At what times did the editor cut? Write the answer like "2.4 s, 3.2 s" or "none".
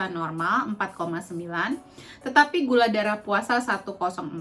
none

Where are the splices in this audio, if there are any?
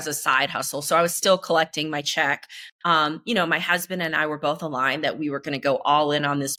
none

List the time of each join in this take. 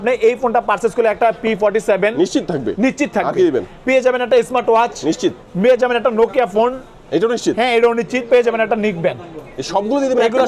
none

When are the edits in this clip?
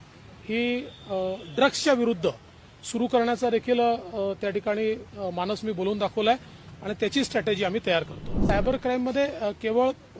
8.3 s

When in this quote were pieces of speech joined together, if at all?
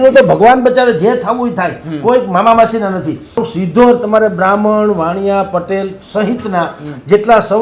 3.4 s

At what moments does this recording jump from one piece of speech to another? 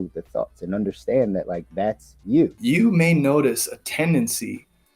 2.6 s

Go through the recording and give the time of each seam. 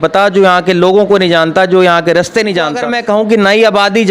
2.9 s

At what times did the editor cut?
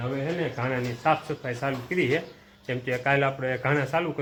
none

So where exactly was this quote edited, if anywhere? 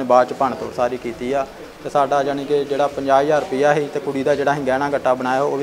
none

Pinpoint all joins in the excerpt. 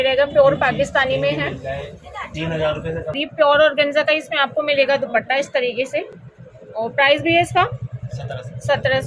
none

